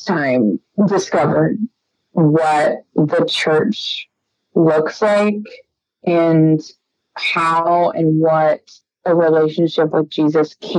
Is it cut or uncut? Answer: uncut